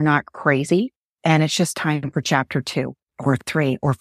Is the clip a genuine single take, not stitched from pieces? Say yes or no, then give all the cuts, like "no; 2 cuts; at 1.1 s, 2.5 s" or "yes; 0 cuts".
no; 2 cuts; at 1.0 s, 3.0 s